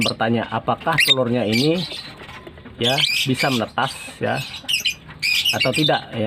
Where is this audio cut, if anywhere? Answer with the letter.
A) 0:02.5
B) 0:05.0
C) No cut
C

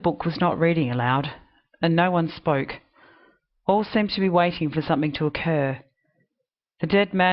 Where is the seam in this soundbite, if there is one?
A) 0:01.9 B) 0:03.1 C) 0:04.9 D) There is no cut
A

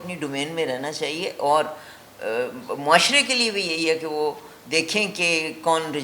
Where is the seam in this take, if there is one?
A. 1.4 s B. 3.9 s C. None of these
C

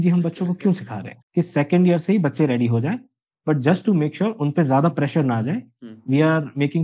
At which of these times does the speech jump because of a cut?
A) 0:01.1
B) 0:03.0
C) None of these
A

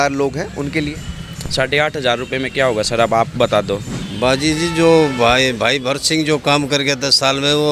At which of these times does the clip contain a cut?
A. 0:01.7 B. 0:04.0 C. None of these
B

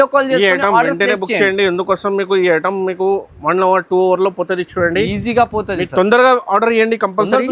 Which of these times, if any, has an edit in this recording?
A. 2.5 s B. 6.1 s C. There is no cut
C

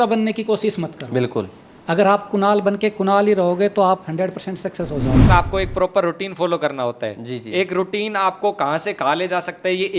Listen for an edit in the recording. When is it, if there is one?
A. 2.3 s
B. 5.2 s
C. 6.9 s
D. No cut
B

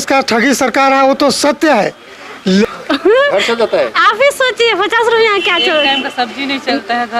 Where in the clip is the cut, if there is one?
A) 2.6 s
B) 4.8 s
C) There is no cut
A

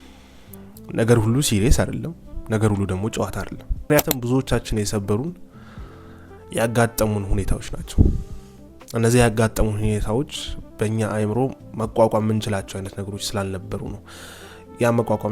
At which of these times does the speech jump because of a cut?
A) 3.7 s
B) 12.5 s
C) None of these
A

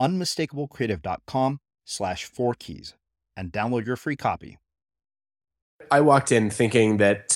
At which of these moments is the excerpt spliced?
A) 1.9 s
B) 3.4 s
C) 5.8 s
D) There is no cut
C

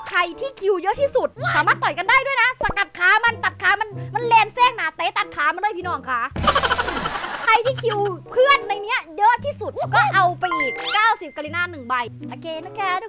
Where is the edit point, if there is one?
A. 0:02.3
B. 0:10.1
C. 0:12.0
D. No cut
C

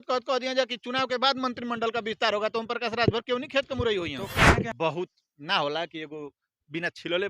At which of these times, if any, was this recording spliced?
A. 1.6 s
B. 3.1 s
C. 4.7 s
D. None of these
C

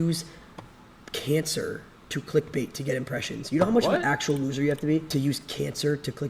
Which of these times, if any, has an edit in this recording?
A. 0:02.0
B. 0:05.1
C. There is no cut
B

